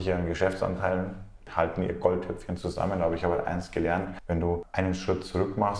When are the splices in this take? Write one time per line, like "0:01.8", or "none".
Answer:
0:01.5
0:04.5